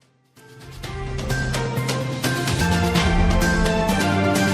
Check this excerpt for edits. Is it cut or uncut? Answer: cut